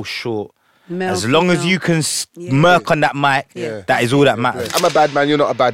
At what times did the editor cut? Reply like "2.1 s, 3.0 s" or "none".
4.7 s

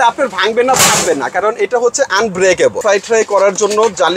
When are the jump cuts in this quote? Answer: 2.8 s

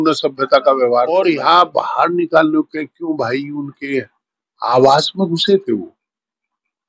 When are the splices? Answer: 1.1 s

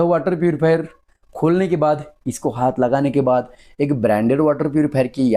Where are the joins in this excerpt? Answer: none

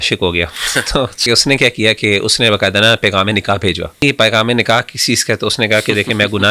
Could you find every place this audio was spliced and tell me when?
1.2 s, 4.0 s

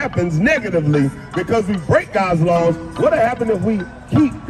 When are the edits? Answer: none

